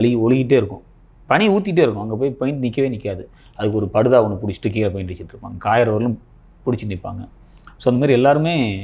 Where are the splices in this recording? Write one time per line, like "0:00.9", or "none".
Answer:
none

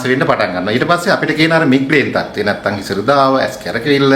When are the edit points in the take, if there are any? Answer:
none

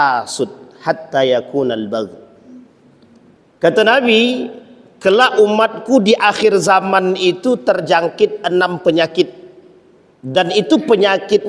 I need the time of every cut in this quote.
0:03.3

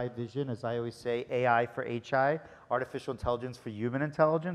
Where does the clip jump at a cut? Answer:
none

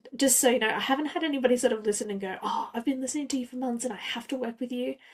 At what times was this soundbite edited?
none

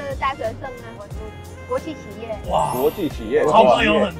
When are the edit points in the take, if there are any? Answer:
0:00.9

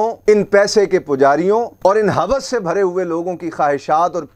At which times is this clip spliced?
none

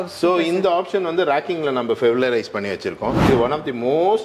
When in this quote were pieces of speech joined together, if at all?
0:03.2

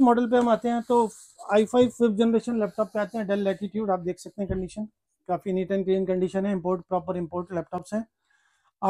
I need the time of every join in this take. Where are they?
none

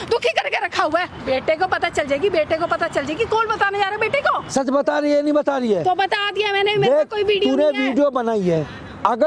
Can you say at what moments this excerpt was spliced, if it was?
0:01.1
0:04.5

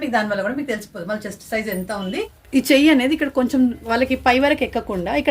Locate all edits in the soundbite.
0:02.4

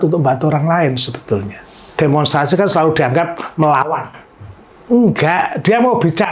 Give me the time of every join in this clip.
0:01.8

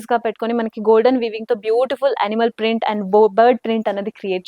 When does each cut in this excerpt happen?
none

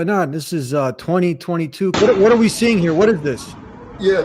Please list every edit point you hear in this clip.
0:01.9

